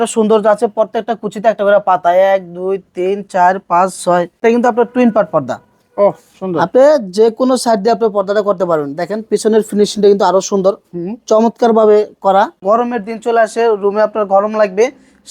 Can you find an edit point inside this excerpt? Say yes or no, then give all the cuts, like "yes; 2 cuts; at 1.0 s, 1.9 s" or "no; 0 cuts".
yes; 2 cuts; at 4.4 s, 12.6 s